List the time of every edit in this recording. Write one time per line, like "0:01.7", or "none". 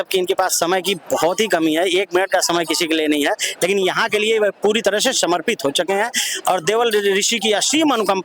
none